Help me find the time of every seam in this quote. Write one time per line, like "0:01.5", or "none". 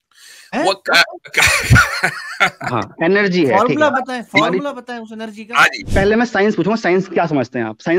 0:05.8